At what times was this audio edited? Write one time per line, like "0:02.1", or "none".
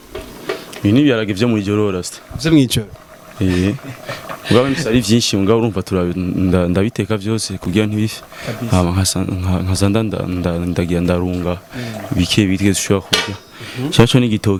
none